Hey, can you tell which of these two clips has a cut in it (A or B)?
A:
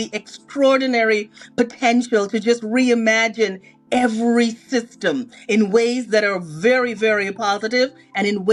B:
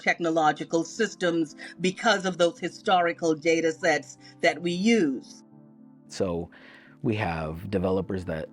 B